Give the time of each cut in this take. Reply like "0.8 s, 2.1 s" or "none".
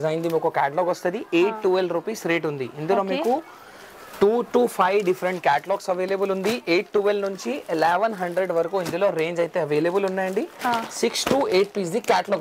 none